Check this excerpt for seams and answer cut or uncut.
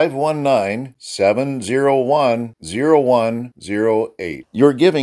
uncut